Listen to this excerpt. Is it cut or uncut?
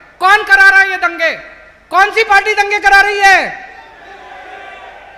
uncut